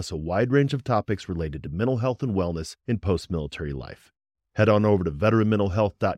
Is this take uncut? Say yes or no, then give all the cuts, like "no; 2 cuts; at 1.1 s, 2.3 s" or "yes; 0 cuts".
yes; 0 cuts